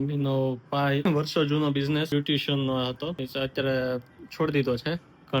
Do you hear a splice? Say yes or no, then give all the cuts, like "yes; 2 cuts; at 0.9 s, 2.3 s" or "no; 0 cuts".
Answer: yes; 3 cuts; at 1.1 s, 2.1 s, 3.2 s